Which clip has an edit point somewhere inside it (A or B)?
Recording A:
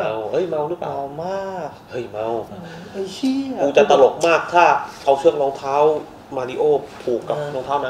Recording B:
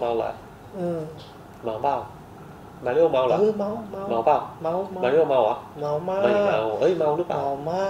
A